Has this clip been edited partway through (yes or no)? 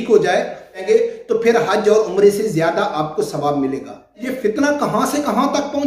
yes